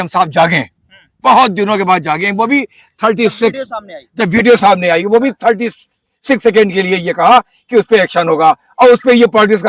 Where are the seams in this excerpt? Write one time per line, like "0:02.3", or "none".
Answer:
none